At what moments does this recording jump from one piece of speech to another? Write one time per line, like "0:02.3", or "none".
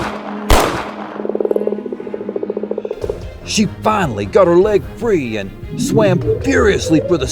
0:01.0
0:02.8